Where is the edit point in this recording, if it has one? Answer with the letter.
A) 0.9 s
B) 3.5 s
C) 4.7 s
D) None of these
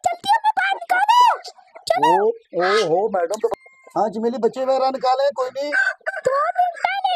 B